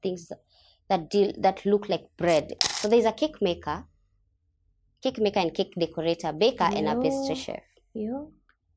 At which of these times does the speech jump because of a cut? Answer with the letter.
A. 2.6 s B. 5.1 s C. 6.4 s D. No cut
A